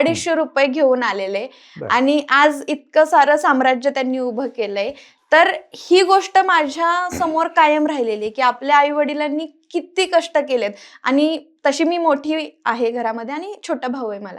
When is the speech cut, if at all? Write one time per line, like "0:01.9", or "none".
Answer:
none